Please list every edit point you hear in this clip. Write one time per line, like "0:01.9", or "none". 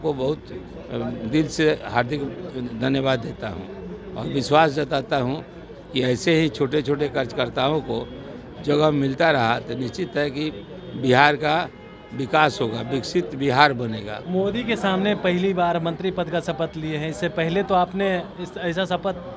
0:14.1

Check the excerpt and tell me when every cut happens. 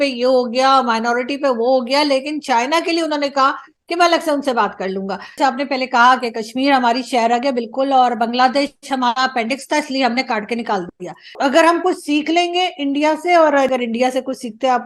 0:05.4
0:11.3
0:13.7

